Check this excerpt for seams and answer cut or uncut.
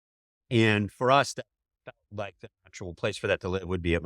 cut